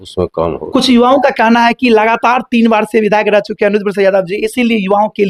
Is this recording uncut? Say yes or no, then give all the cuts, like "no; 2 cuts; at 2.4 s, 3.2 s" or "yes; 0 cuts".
yes; 0 cuts